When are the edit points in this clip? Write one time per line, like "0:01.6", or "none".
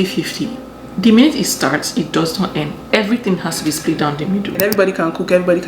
0:04.6